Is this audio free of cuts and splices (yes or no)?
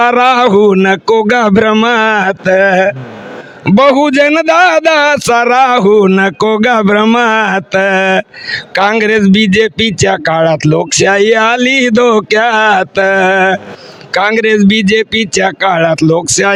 yes